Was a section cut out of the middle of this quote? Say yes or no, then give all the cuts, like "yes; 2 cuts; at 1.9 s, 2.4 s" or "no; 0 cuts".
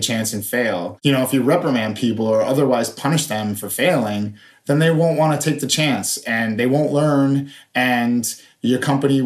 yes; 1 cut; at 0.9 s